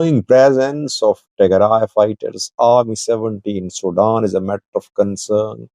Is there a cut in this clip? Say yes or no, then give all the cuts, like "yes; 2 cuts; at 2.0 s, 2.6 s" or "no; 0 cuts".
no; 0 cuts